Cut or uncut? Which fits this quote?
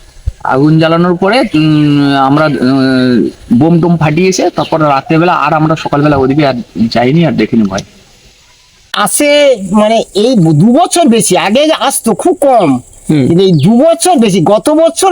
cut